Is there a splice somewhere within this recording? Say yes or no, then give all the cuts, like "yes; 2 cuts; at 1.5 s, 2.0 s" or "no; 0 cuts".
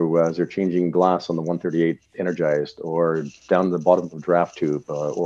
no; 0 cuts